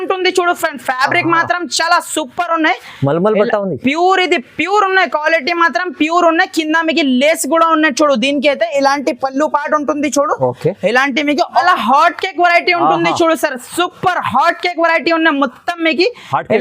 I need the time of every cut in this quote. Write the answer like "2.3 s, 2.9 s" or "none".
11.6 s